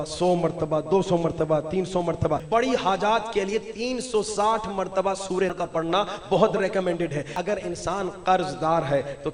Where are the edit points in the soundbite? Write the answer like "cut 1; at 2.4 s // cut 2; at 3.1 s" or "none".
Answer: cut 1; at 2.4 s // cut 2; at 5.5 s // cut 3; at 7.3 s